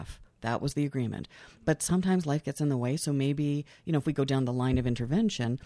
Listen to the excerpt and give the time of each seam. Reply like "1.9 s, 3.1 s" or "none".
none